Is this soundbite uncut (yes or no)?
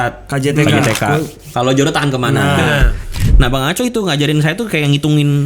no